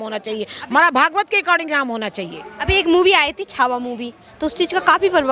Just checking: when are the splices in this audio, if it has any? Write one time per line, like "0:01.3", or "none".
none